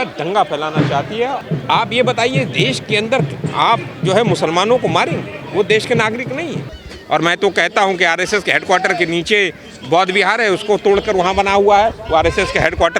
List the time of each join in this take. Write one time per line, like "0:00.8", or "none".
0:01.4
0:06.7